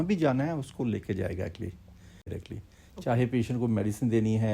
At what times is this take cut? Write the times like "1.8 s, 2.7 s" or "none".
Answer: 2.4 s